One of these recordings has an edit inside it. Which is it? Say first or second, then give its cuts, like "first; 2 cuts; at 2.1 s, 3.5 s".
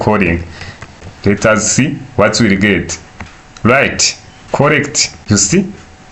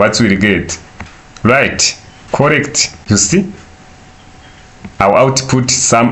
first; 1 cut; at 1.1 s